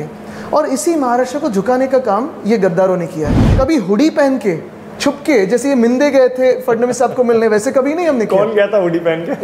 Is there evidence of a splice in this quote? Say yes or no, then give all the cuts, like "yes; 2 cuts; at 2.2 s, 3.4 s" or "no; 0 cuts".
yes; 1 cut; at 3.4 s